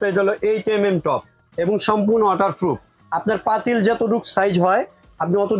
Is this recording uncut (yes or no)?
no